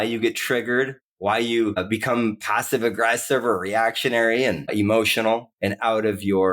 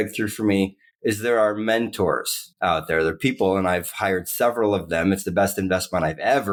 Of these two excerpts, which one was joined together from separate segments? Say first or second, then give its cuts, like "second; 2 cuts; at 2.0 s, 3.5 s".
first; 3 cuts; at 1.0 s, 1.8 s, 4.7 s